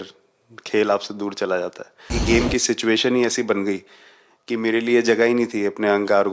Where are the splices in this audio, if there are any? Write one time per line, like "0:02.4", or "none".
0:02.2